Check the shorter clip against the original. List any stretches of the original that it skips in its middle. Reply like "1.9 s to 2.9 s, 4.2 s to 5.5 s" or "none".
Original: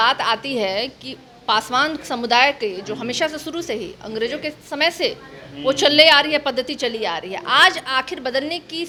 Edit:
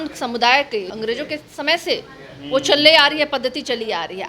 2.8 s to 4.0 s